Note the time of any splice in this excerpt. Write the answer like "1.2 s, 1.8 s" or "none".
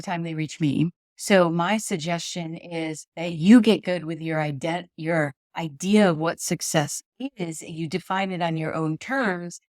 1.1 s, 3.1 s